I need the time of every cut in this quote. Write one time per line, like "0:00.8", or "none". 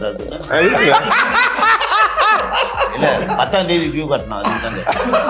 none